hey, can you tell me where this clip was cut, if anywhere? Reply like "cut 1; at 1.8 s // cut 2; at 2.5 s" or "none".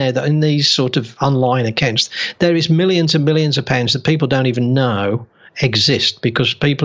cut 1; at 1.1 s